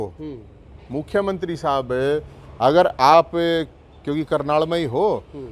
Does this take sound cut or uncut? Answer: uncut